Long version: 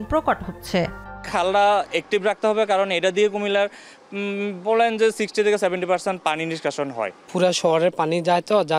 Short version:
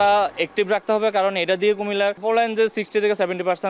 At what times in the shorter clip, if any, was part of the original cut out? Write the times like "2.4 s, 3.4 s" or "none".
2.2 s